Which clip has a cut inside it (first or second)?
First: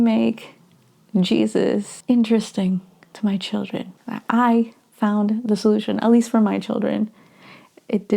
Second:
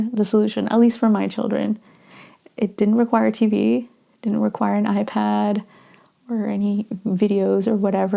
first